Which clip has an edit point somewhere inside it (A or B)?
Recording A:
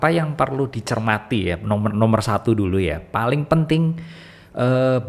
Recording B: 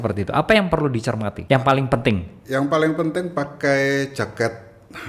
B